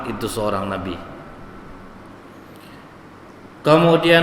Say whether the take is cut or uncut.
cut